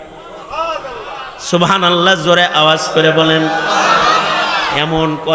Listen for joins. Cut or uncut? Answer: uncut